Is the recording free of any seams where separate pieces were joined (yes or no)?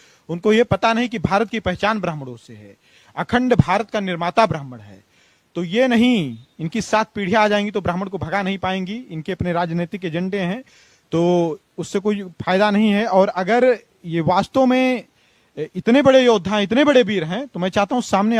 yes